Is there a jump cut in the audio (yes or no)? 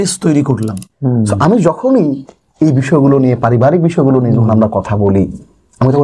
yes